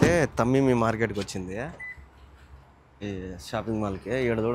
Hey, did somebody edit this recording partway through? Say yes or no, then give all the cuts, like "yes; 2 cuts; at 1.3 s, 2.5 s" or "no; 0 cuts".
no; 0 cuts